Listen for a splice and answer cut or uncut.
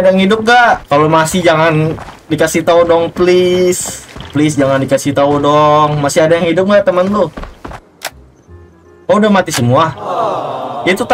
uncut